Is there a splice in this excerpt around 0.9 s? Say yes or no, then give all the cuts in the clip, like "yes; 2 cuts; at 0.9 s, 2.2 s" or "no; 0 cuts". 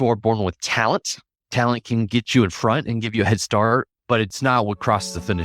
no; 2 cuts; at 2.3 s, 4.3 s